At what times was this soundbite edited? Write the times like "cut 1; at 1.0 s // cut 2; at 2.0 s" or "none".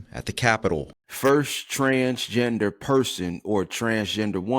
cut 1; at 1.0 s